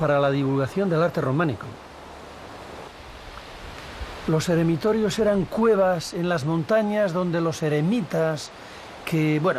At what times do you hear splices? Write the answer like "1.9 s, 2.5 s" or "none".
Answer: 2.7 s